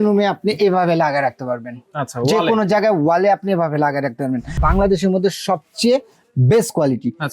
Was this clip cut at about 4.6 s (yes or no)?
yes